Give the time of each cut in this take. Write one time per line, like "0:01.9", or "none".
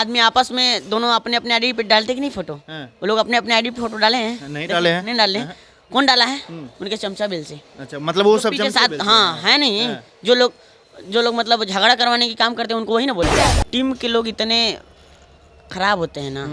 0:13.4